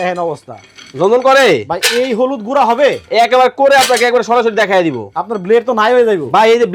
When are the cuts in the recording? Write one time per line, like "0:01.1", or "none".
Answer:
none